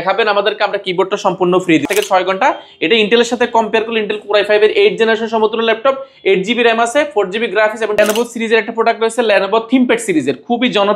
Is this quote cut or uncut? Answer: cut